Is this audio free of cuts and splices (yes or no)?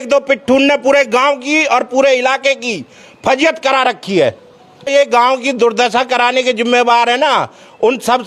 no